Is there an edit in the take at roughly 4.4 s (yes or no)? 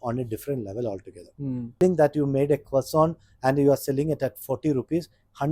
no